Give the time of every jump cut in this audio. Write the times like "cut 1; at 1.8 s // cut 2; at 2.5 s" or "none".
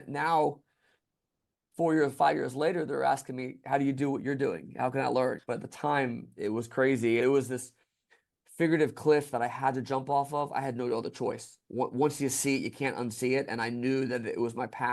cut 1; at 5.4 s // cut 2; at 7.2 s